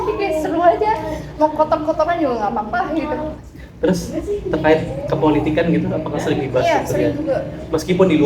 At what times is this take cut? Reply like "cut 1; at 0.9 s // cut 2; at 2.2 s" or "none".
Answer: cut 1; at 3.4 s